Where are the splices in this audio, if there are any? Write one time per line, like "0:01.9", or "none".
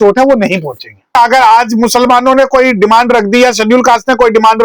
0:01.1